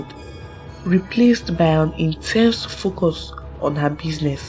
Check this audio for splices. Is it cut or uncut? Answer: uncut